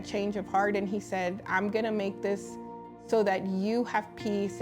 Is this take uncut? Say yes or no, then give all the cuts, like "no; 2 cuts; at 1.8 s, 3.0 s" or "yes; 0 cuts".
yes; 0 cuts